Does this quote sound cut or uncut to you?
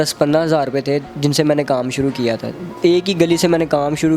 cut